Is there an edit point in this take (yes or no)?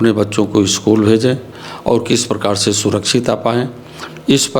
no